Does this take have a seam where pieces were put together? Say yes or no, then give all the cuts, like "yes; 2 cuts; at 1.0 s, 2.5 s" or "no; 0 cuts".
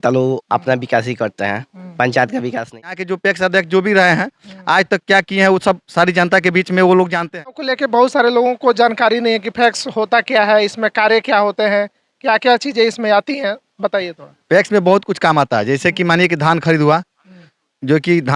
yes; 2 cuts; at 3.0 s, 7.7 s